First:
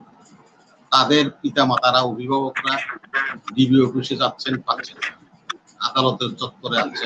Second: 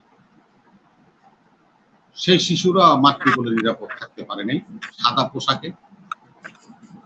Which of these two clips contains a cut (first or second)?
second